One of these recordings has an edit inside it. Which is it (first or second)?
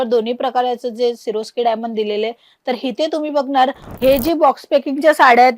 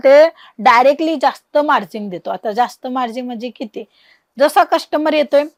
first